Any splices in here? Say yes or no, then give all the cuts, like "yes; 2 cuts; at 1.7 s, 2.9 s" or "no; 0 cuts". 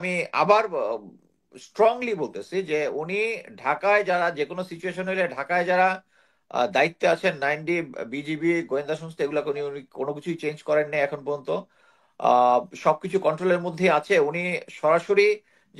no; 0 cuts